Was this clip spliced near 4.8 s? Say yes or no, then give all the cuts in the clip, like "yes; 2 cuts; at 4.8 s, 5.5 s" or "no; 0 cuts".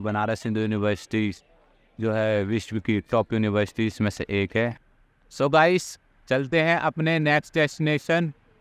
yes; 1 cut; at 4.8 s